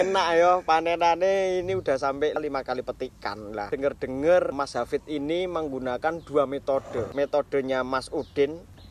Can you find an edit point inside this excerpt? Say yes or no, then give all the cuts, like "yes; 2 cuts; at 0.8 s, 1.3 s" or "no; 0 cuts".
yes; 2 cuts; at 3.7 s, 7.1 s